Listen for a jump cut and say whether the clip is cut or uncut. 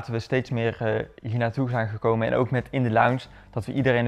uncut